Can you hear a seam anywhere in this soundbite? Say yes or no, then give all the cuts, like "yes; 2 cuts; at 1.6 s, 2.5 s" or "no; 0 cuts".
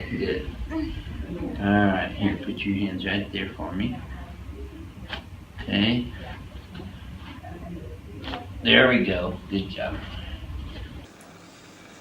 yes; 1 cut; at 9.7 s